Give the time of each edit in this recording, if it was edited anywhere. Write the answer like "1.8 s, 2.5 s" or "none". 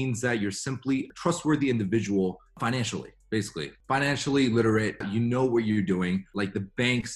1.1 s, 2.6 s, 3.7 s, 5.0 s, 6.3 s